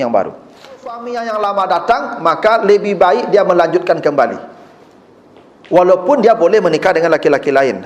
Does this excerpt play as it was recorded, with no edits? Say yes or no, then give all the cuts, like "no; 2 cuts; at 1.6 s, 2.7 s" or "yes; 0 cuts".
no; 1 cut; at 1.1 s